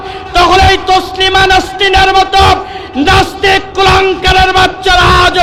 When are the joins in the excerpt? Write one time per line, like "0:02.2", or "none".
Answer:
none